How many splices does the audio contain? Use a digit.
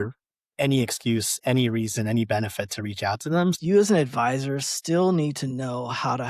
1